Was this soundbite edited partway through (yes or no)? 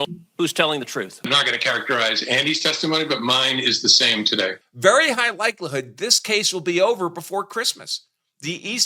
yes